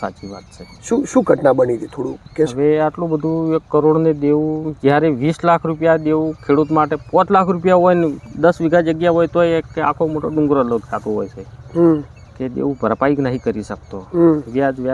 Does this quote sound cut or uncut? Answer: uncut